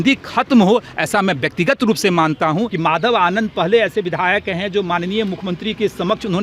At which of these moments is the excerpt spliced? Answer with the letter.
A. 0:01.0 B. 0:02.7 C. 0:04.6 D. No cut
B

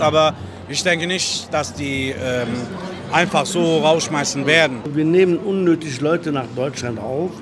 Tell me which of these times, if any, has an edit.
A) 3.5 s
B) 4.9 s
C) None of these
B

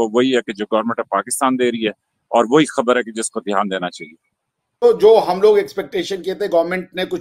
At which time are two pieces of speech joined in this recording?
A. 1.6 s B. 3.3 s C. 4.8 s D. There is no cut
C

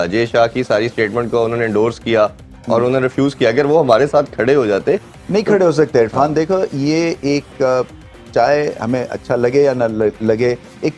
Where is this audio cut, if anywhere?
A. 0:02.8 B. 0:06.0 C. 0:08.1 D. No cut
D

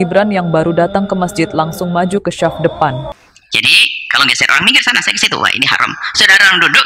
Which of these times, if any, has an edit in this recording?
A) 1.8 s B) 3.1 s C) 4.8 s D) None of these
B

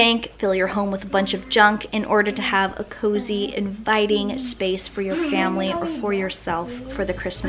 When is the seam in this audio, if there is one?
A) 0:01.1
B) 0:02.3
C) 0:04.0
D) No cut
D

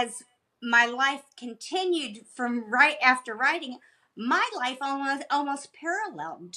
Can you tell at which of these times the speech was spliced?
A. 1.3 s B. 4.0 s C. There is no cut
C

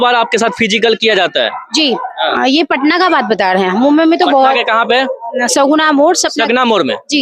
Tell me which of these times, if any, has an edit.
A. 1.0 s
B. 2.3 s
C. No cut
C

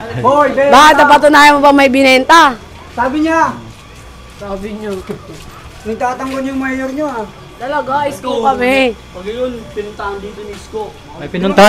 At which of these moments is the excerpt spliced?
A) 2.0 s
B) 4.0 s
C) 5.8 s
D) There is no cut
D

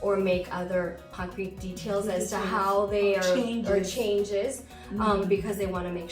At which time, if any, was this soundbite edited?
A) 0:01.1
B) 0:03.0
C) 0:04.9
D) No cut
A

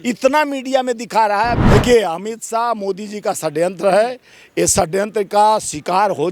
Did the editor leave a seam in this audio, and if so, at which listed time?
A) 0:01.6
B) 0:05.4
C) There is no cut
A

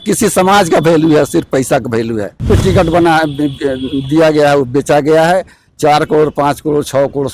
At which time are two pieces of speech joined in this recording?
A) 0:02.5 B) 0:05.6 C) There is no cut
A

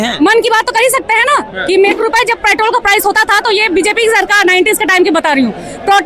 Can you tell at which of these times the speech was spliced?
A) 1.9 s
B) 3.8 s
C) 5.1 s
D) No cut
A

